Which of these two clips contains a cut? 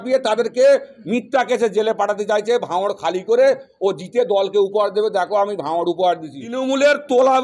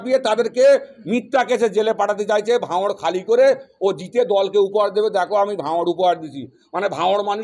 first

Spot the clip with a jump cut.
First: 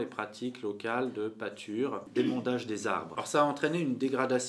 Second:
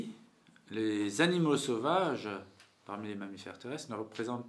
first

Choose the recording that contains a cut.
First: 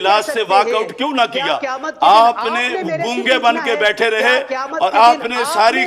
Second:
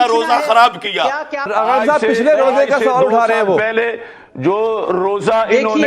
second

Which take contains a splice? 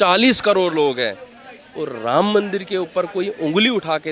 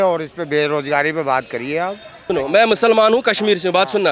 second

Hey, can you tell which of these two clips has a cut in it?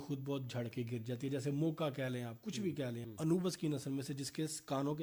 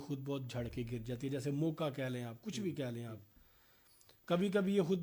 first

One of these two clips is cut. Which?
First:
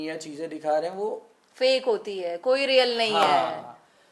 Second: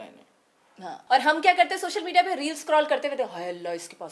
second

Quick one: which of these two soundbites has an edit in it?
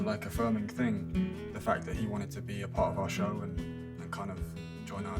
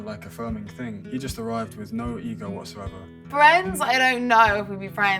second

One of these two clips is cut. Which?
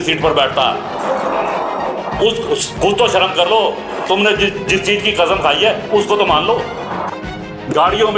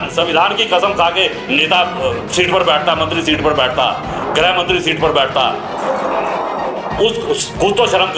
first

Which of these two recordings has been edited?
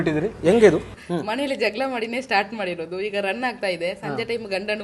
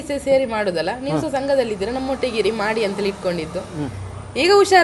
first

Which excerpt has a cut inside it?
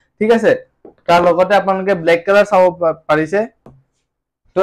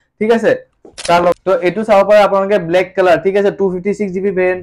second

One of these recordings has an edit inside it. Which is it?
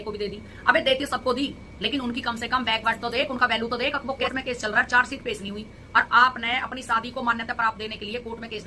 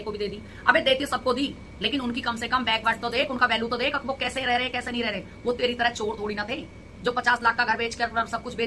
first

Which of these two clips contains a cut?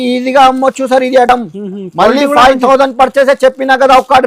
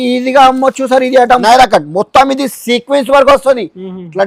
second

